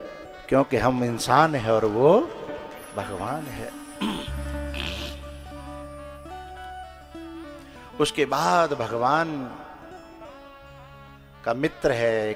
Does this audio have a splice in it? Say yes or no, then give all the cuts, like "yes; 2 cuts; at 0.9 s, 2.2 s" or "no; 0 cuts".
no; 0 cuts